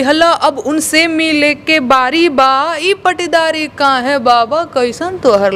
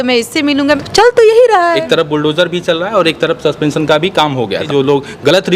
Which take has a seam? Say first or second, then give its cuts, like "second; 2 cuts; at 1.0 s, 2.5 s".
second; 3 cuts; at 0.8 s, 1.8 s, 4.6 s